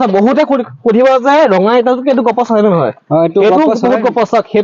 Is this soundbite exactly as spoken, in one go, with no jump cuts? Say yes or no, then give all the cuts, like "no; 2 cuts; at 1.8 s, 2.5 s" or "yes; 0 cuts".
yes; 0 cuts